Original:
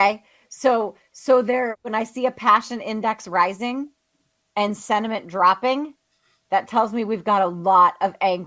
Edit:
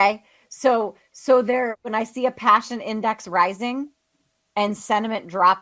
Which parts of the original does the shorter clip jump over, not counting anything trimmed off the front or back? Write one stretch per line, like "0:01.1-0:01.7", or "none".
none